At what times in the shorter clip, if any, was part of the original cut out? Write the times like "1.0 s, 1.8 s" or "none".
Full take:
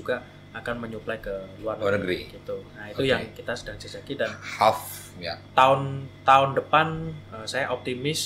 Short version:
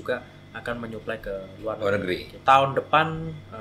2.3 s